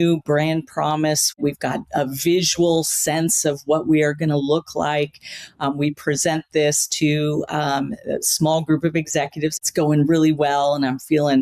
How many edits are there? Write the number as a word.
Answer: two